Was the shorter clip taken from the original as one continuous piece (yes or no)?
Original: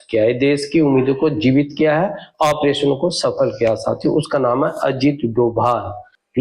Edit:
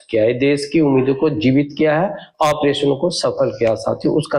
yes